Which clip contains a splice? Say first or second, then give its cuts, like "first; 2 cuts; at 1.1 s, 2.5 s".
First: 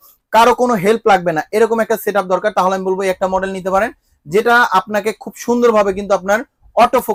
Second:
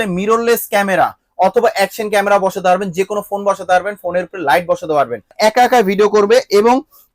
second; 1 cut; at 5.3 s